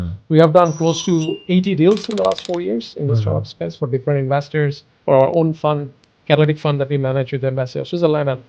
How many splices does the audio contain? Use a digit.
1